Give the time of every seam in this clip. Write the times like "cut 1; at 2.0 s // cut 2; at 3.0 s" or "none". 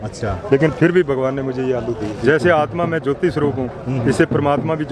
cut 1; at 2.1 s